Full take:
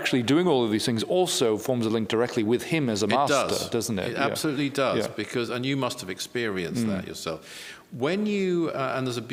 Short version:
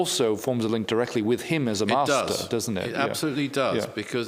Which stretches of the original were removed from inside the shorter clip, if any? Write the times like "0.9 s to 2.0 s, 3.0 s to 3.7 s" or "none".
none